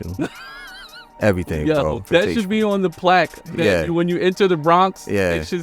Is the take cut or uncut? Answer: cut